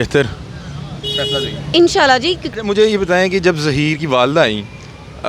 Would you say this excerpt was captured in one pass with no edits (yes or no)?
no